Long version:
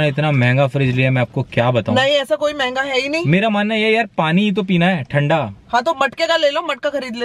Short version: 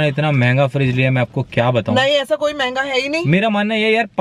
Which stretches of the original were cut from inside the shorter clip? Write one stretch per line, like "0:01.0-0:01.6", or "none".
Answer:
none